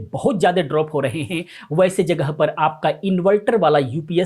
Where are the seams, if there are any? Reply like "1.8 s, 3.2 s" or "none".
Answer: none